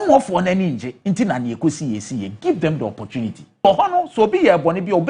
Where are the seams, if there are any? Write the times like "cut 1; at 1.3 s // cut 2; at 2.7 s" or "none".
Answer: cut 1; at 3.6 s